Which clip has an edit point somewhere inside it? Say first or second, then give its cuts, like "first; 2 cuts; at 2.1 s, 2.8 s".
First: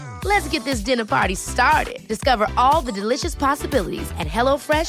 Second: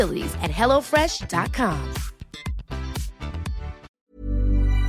second; 1 cut; at 3.9 s